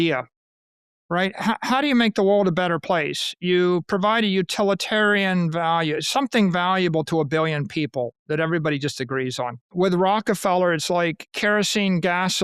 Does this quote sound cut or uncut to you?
cut